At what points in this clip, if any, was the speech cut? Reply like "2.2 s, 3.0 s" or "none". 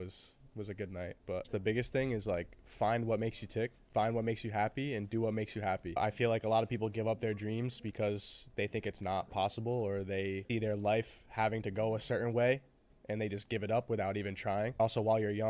1.5 s, 3.8 s, 6.0 s, 10.4 s, 14.8 s

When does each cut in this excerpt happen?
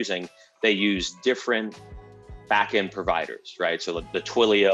none

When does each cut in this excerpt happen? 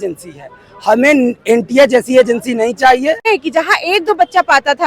3.2 s

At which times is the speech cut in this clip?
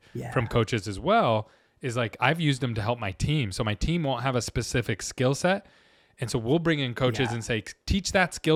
none

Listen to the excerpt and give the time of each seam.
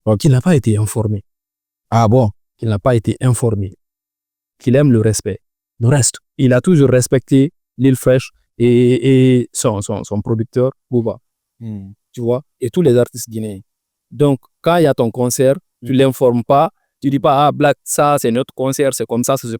none

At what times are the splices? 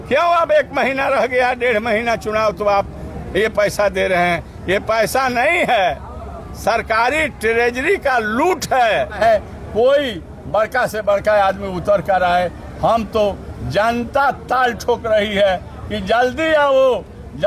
9.2 s

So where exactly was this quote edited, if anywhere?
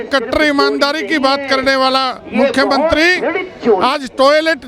none

